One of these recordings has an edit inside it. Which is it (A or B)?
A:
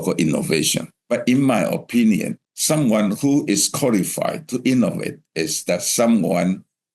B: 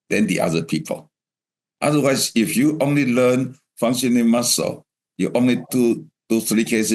A